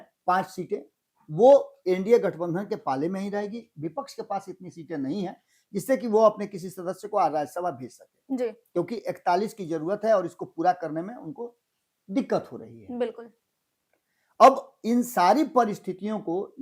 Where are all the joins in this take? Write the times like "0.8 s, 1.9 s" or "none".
none

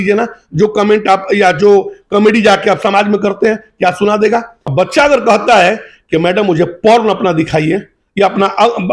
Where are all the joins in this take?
4.6 s

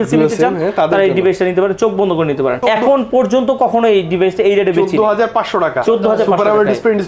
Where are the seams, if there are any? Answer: 2.6 s

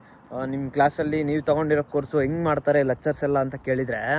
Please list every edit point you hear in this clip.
none

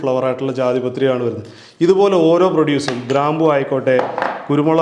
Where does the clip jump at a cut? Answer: none

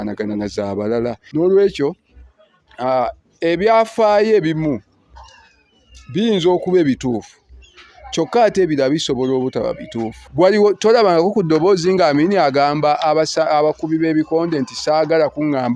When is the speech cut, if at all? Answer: 1.2 s, 10.2 s

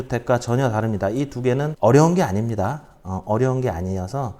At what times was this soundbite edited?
1.7 s

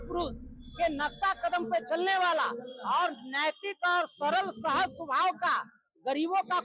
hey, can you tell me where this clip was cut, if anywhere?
none

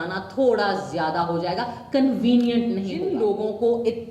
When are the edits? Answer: 3.1 s

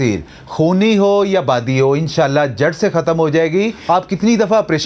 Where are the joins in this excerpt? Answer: 3.8 s

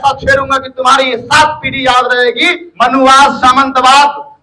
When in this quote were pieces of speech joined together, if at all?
2.6 s

